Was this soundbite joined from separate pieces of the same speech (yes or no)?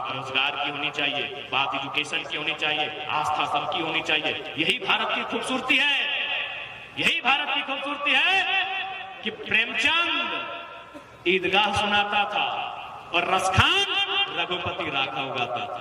no